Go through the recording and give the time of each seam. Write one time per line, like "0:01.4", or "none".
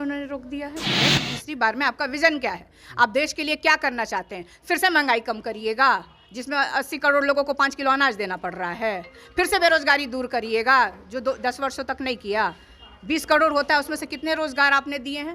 0:00.9